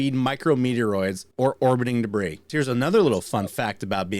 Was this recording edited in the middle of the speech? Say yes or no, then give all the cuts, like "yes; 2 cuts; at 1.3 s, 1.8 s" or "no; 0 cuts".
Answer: yes; 2 cuts; at 1.2 s, 2.5 s